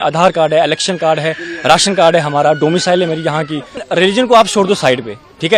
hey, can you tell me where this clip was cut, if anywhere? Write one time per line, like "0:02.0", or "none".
0:03.9